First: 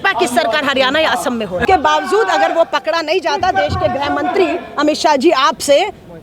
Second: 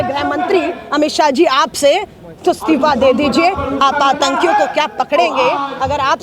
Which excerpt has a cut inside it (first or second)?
first